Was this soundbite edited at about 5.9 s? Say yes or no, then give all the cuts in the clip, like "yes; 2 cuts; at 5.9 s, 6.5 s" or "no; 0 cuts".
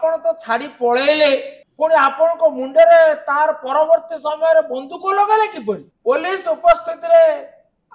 yes; 2 cuts; at 1.6 s, 5.9 s